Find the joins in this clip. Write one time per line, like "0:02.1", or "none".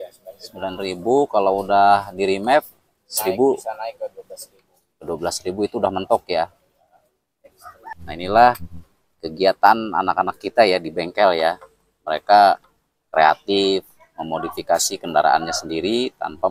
0:07.9

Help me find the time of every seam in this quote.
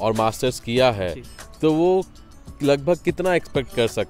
none

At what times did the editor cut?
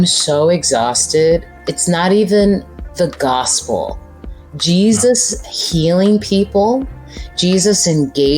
0:01.6
0:02.8

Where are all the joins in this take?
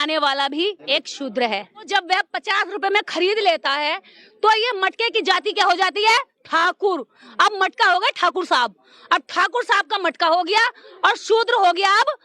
0:00.8
0:01.9

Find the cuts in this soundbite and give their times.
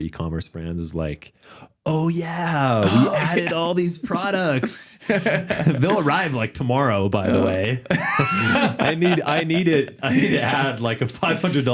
none

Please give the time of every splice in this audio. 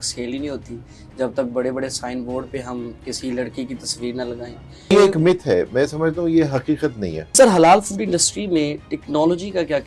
0:04.9
0:07.3

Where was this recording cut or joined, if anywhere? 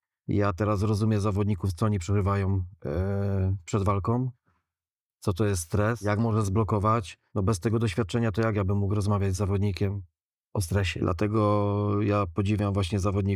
0:10.9

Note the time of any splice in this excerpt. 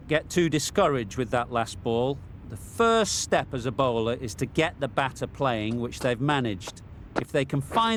none

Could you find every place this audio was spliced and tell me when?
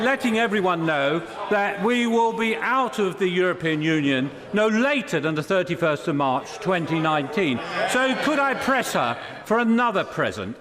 0:07.7

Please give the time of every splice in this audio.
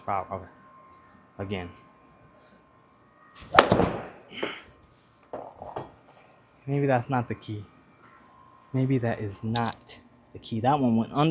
none

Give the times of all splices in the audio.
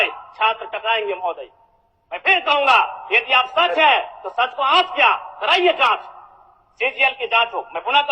none

